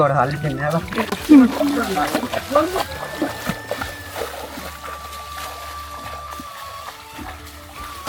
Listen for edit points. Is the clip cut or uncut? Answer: uncut